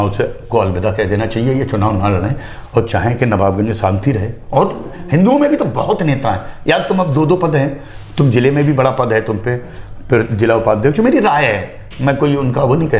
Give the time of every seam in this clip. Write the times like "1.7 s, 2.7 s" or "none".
none